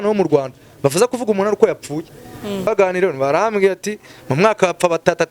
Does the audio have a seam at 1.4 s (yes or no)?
no